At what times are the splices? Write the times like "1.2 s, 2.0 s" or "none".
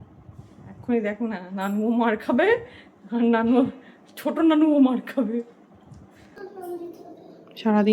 6.3 s